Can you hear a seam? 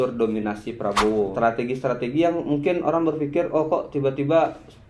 yes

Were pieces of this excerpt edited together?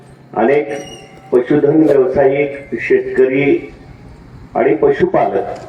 no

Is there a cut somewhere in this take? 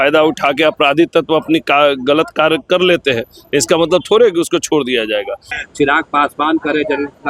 yes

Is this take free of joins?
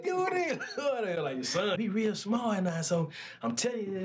no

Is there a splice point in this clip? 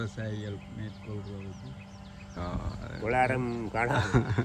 yes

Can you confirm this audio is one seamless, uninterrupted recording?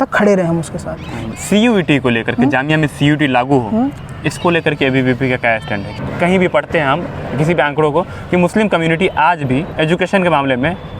no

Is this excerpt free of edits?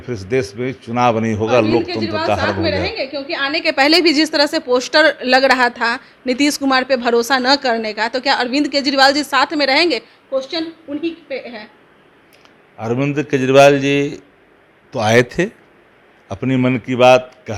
yes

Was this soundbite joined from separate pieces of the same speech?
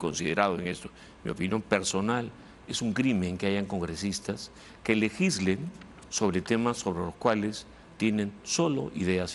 no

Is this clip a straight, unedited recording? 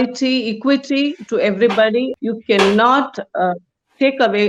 no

